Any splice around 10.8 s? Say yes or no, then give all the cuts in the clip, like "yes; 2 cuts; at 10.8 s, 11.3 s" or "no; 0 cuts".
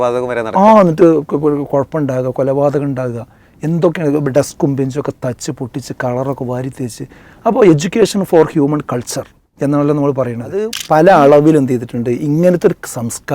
yes; 1 cut; at 10.8 s